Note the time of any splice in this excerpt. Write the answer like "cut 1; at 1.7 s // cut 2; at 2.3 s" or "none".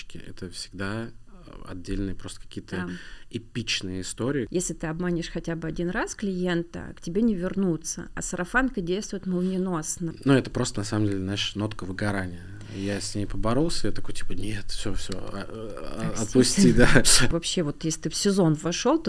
cut 1; at 4.5 s // cut 2; at 10.1 s // cut 3; at 17.3 s